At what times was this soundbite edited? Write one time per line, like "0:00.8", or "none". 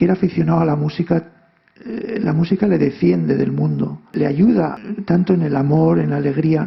0:04.1
0:04.8